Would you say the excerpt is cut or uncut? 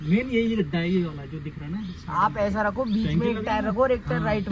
uncut